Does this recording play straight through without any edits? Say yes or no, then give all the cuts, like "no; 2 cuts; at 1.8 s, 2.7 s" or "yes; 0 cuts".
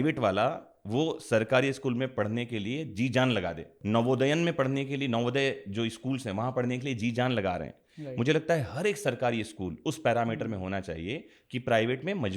no; 1 cut; at 3.7 s